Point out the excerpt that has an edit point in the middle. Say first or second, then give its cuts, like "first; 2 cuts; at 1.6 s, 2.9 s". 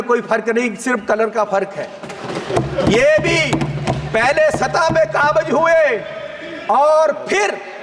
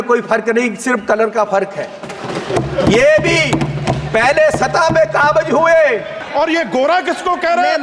second; 1 cut; at 6.2 s